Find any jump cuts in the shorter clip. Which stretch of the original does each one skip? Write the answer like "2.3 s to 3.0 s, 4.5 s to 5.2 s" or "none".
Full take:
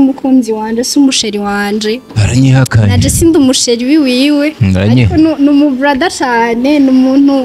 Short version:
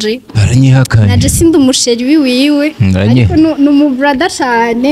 none